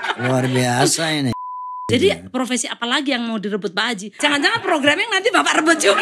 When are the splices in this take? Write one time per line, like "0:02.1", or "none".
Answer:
0:01.4
0:04.1